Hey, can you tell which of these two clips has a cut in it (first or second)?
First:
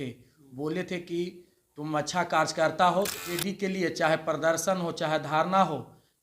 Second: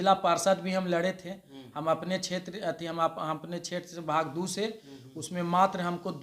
first